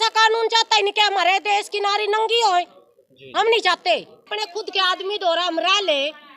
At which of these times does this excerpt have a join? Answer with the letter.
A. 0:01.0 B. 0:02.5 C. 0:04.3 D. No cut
C